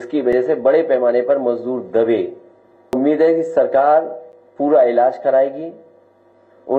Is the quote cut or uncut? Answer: cut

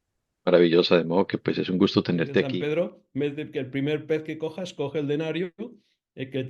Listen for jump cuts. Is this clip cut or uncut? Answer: cut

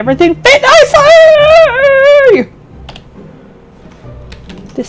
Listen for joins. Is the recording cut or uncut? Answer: uncut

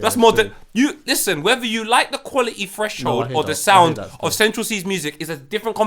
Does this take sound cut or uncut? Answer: uncut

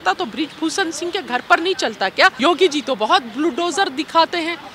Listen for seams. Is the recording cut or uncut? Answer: cut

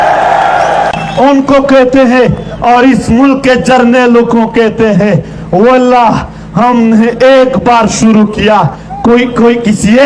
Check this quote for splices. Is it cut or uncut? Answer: cut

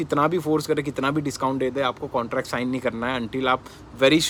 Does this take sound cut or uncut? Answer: uncut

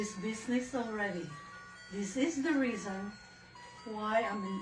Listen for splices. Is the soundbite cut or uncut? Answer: uncut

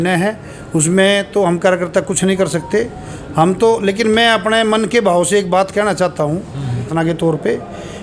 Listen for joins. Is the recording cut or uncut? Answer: cut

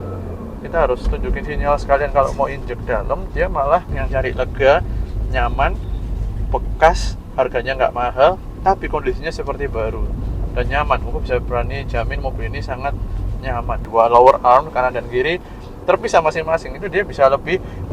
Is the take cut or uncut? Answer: cut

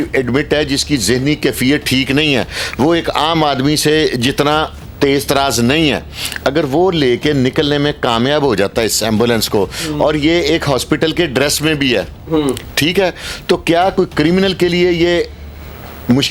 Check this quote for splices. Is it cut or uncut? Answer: uncut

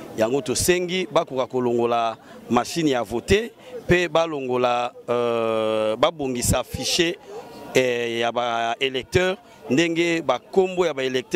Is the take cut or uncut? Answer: uncut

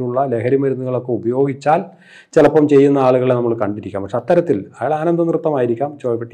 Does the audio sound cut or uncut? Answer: uncut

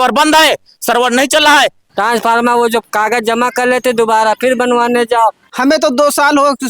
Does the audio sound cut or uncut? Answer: cut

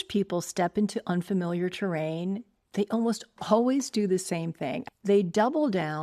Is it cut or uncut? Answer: cut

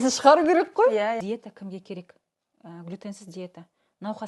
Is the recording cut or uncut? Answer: cut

